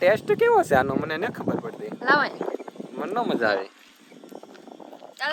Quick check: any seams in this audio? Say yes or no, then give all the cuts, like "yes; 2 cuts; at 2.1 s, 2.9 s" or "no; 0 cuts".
no; 0 cuts